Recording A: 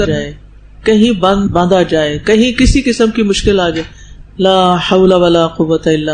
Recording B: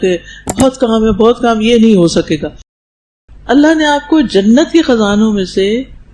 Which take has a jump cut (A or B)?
B